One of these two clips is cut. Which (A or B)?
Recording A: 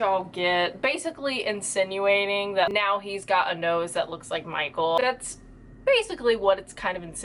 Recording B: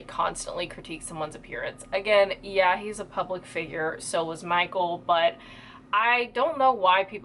A